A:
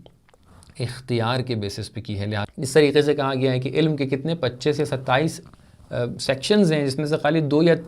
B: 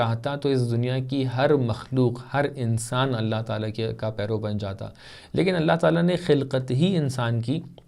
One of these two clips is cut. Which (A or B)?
A